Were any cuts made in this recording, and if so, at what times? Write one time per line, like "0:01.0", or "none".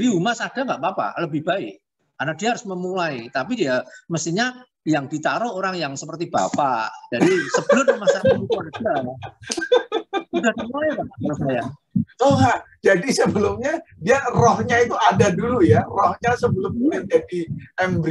none